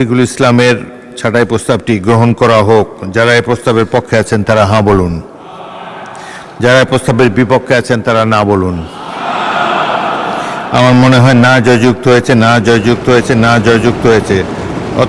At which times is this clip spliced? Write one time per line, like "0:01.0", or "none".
none